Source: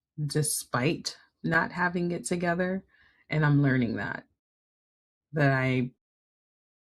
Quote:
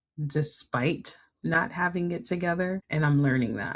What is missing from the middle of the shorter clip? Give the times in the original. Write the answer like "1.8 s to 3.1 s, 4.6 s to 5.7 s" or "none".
2.8 s to 3.2 s